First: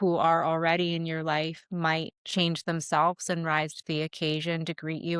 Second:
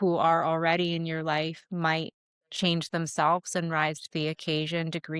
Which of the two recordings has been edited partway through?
first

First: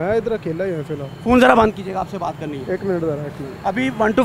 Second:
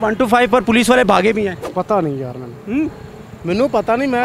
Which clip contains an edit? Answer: second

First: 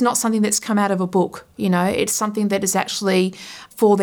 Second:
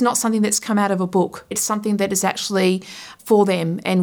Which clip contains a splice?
second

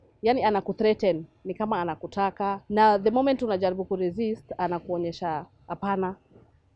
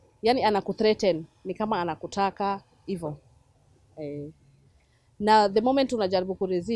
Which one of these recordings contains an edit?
first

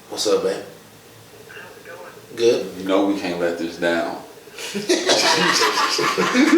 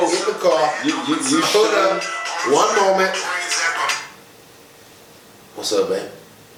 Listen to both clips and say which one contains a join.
first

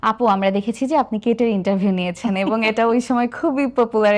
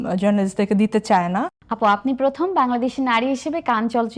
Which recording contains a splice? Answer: second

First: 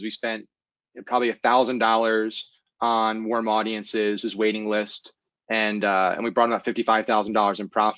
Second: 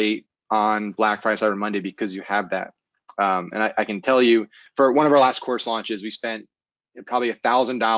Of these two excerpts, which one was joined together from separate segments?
second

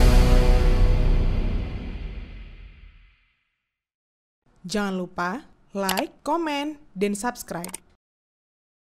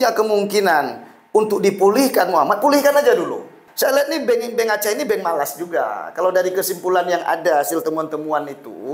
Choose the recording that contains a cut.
second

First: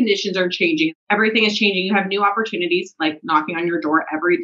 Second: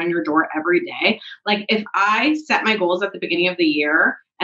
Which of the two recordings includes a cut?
first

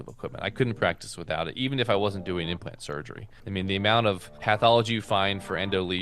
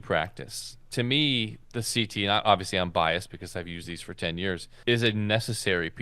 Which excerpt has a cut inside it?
second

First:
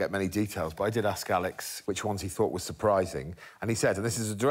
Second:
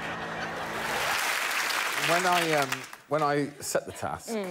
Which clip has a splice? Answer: second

